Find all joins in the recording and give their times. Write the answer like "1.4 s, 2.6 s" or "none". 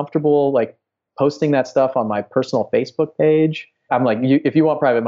3.9 s

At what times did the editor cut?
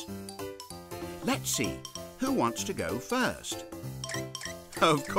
1.2 s

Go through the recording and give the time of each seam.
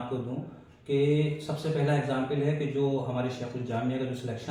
none

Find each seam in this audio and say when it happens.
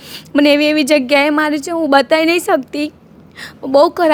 none

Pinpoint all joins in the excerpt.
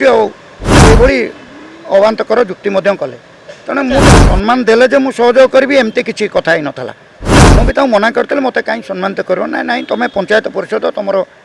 4.0 s

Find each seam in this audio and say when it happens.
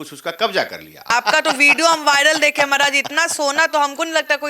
1.1 s

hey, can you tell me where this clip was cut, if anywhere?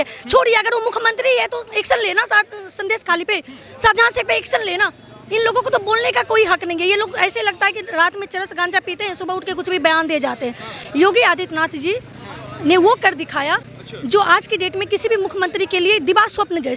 none

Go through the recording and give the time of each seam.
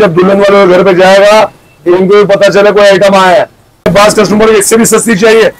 3.9 s

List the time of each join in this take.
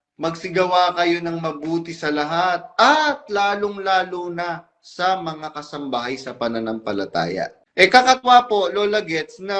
7.6 s

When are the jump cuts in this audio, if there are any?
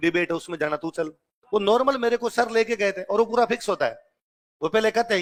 none

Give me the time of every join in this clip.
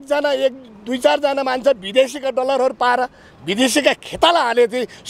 none

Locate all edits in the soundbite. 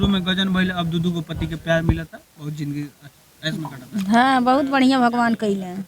none

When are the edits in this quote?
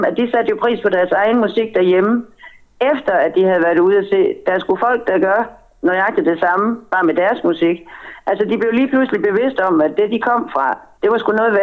none

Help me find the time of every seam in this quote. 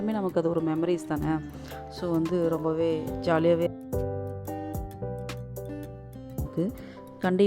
3.7 s, 6.5 s

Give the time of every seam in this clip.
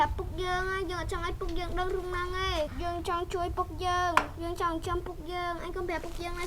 2.8 s

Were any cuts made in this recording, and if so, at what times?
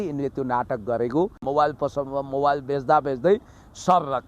1.4 s

